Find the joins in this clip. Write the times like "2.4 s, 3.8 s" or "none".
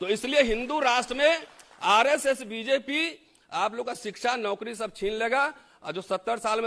none